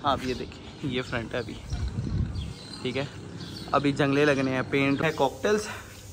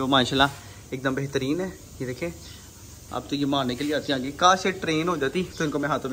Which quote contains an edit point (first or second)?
first